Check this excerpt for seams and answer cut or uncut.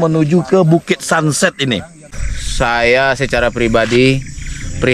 cut